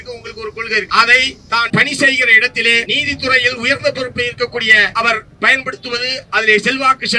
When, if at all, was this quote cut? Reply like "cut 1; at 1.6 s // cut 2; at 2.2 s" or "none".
cut 1; at 0.9 s // cut 2; at 1.7 s // cut 3; at 2.9 s // cut 4; at 4.9 s

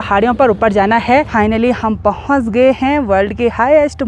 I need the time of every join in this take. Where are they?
cut 1; at 1.3 s

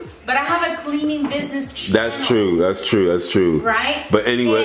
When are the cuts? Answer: none

